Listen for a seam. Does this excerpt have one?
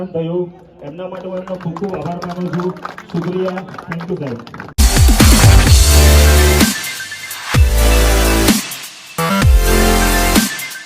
yes; 1 cut; at 4.6 s

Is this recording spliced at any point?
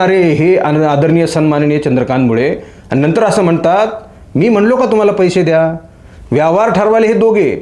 no; 0 cuts

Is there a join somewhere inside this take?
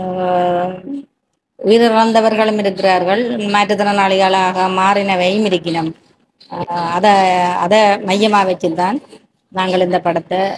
no; 0 cuts

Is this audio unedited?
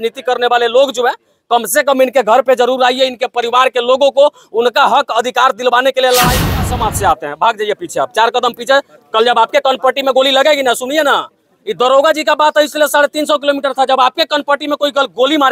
no; 1 cut; at 6.6 s

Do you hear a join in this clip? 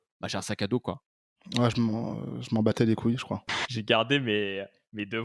yes; 1 cut; at 3.5 s

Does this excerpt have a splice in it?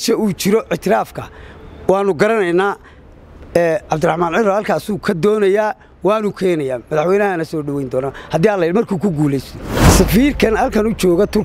yes; 1 cut; at 9.8 s

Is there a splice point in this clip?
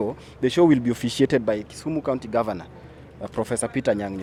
no; 0 cuts

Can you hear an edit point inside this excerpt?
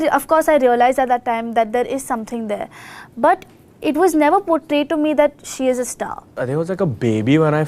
yes; 1 cut; at 6.4 s

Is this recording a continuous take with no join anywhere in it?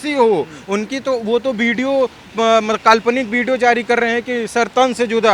yes; 0 cuts

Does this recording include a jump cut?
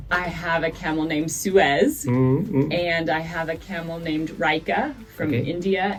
no; 0 cuts

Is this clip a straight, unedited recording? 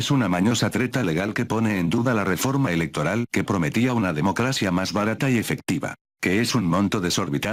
yes; 0 cuts

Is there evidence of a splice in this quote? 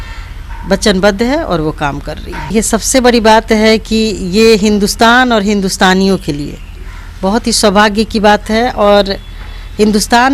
yes; 1 cut; at 2.5 s

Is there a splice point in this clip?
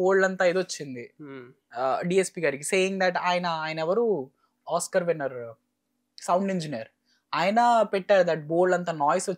no; 0 cuts

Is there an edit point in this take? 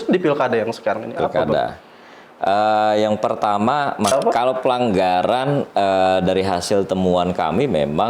yes; 1 cut; at 4.1 s

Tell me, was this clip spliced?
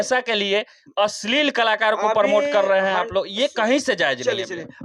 no; 0 cuts

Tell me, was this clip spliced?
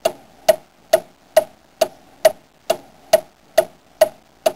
yes; 1 cut; at 3.2 s

